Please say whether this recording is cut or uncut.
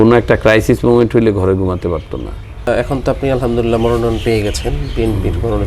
uncut